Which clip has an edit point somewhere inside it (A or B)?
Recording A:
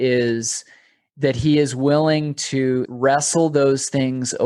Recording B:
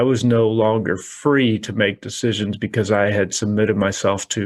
A